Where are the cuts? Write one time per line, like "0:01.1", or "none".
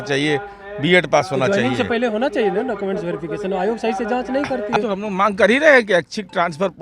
0:04.8